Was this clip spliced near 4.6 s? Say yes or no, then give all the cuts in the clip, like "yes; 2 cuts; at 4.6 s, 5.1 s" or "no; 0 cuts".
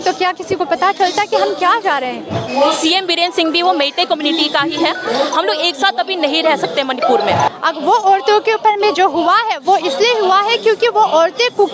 no; 2 cuts; at 2.5 s, 7.5 s